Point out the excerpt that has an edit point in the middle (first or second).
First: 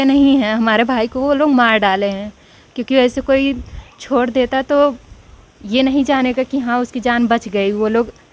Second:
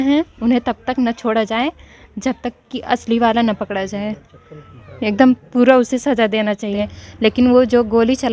second